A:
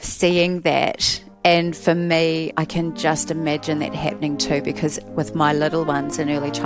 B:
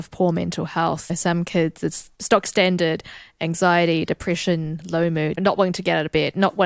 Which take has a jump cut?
B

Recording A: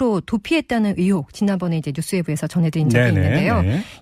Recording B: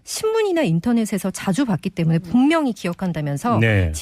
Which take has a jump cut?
B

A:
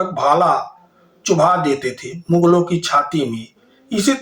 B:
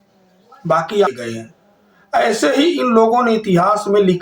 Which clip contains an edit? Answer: B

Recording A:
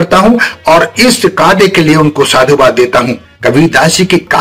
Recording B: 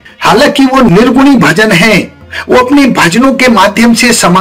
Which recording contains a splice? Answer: A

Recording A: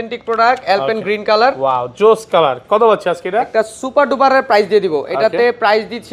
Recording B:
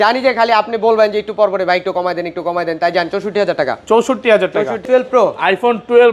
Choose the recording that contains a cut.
B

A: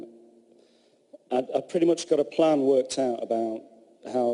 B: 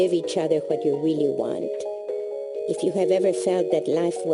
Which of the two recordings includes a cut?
B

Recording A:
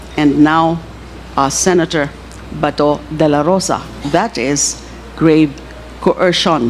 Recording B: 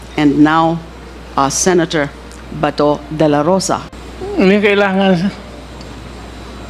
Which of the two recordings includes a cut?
B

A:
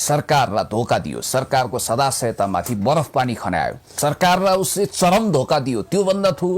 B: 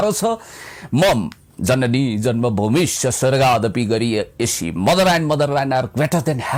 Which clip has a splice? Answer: A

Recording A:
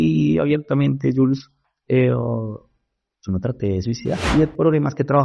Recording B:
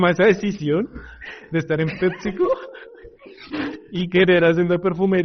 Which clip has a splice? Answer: A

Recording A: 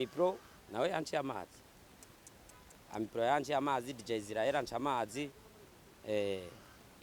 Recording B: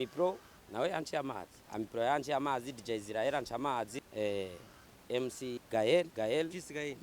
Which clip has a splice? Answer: B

